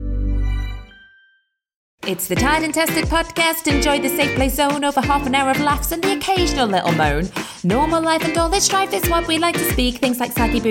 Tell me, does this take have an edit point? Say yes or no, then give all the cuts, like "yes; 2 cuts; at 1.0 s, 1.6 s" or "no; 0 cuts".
yes; 1 cut; at 2.0 s